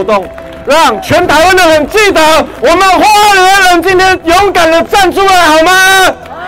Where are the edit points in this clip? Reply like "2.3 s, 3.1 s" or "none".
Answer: 2.5 s

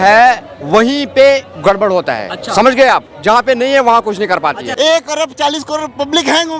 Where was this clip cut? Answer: 4.7 s

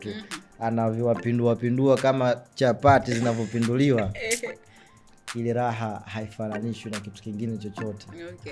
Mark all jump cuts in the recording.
none

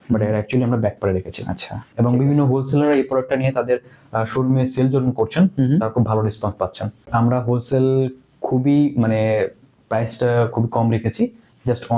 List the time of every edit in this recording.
1.8 s, 7.0 s

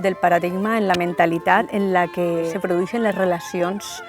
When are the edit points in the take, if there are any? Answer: 1.7 s, 2.5 s

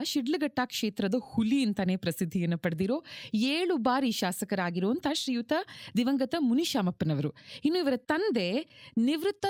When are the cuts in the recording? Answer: none

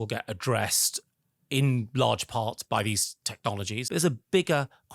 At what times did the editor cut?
2.6 s, 3.8 s

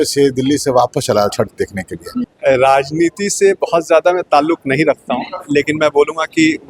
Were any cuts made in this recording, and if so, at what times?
2.3 s

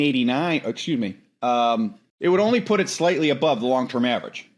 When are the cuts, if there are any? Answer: 2.0 s

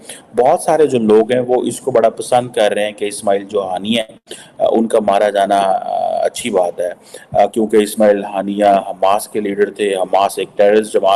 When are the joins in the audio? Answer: none

